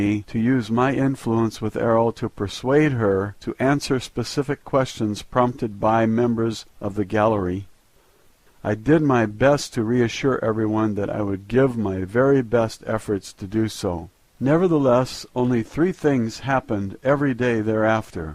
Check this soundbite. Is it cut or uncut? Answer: cut